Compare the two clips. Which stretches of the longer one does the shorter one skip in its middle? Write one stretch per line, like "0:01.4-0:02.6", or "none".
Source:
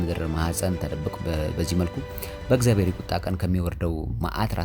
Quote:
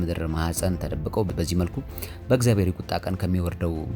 0:01.3-0:01.5